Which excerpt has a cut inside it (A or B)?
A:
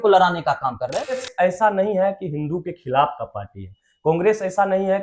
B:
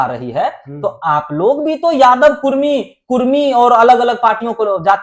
A